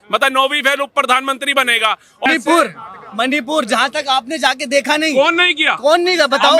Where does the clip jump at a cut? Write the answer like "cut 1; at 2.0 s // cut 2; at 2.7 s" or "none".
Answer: cut 1; at 2.3 s